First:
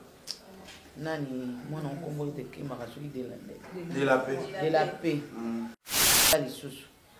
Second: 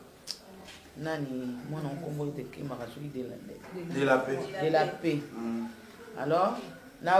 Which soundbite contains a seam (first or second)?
first